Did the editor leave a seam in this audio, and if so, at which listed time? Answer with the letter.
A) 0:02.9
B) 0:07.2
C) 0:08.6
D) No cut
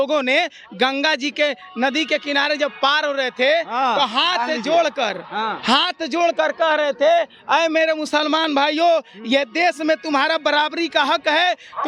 D